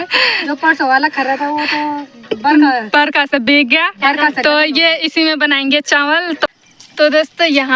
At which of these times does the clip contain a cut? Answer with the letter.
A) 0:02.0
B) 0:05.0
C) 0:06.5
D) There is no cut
C